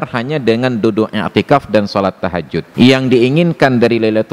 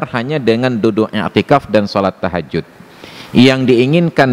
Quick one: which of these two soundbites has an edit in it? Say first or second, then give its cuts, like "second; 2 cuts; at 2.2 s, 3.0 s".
first; 1 cut; at 2.6 s